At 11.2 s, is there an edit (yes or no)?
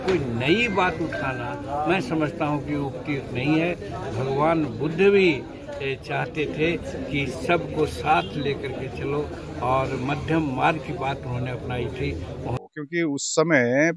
no